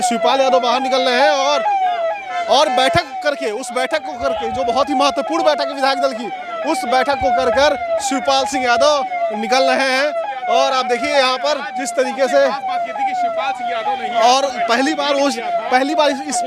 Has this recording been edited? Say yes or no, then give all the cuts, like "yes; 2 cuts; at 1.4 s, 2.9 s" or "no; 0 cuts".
no; 0 cuts